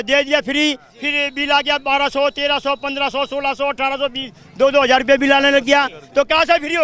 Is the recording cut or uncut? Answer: uncut